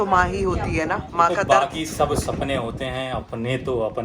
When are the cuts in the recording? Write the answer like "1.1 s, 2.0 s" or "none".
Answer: 1.0 s